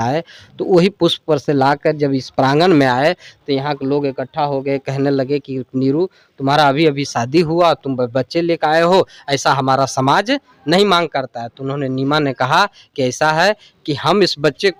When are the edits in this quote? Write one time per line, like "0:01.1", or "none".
none